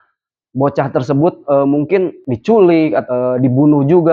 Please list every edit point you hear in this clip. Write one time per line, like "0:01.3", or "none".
0:02.3
0:03.0

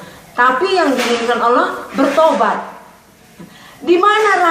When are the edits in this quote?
none

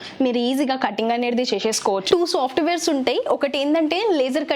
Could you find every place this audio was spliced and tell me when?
0:02.1

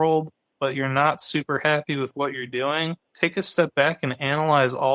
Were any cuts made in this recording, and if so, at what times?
0:03.1

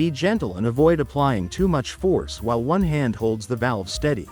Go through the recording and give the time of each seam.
none

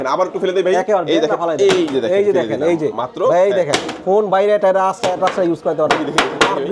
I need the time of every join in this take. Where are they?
none

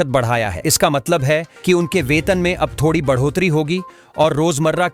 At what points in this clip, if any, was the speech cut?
none

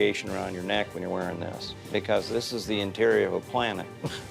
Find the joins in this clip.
none

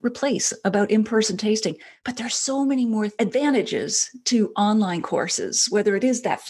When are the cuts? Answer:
0:03.1

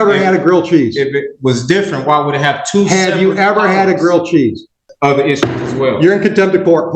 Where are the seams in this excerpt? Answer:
0:04.8

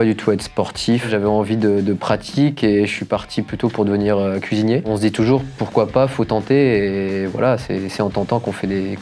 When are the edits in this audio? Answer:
0:01.1
0:04.9

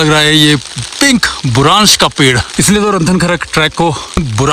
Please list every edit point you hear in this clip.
0:02.4

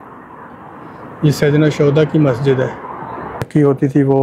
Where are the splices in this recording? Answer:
0:03.3

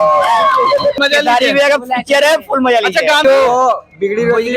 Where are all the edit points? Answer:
0:01.0
0:03.2

